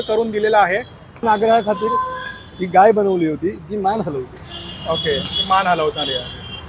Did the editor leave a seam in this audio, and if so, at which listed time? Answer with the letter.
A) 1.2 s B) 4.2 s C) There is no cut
A